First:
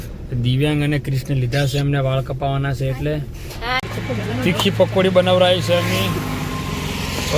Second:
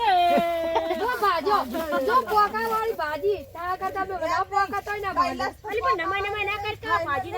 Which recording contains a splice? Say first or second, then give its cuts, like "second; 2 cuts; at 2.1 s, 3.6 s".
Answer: first; 1 cut; at 3.8 s